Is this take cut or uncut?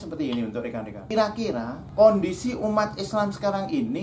cut